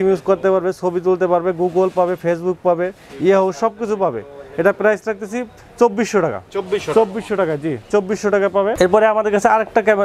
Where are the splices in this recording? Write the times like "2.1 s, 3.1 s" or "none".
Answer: none